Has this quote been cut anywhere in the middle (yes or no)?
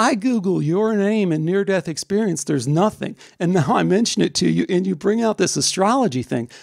no